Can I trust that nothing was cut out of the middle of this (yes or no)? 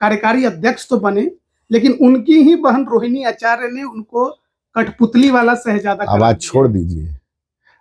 yes